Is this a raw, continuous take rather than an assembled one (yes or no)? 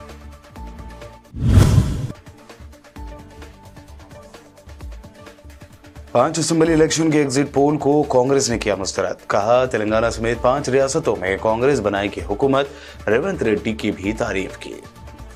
yes